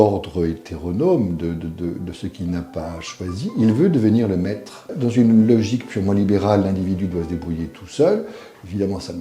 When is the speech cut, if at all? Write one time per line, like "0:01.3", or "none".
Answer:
0:04.9